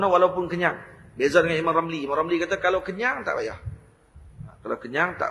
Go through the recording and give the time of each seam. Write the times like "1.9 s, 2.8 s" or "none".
none